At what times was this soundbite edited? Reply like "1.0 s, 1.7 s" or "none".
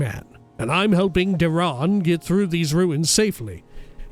none